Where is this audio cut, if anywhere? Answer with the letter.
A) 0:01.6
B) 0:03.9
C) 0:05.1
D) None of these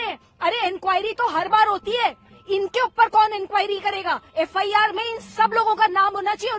D